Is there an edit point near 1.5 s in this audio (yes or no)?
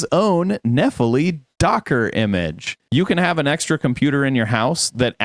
no